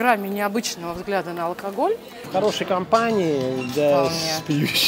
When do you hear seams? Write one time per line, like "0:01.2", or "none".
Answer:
0:02.3